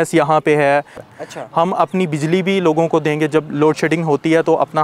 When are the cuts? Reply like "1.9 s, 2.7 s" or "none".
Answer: 1.0 s